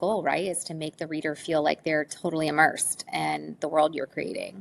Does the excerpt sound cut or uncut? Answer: uncut